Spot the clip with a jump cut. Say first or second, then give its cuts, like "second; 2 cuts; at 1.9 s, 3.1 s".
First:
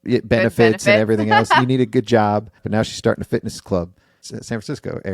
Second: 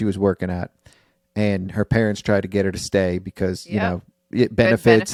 first; 2 cuts; at 2.6 s, 4.1 s